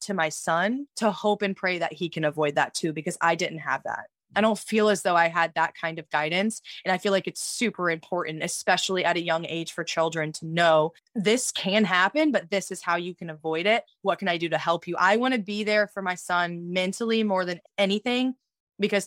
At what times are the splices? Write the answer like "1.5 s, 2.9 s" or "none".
0.9 s, 11.0 s, 17.6 s

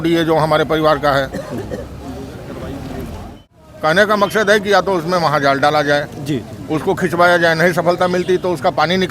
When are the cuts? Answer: 3.5 s

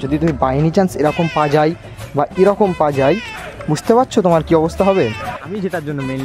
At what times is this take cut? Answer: 5.2 s

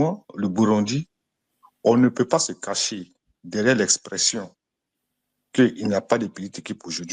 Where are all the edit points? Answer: none

